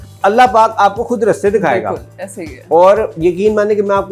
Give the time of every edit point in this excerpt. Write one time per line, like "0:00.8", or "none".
none